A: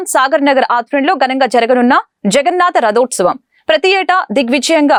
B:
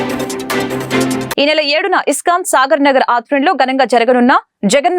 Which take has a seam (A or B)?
B